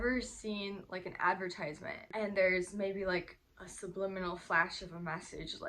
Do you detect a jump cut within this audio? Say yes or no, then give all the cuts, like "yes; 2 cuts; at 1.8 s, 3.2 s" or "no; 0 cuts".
yes; 1 cut; at 2.0 s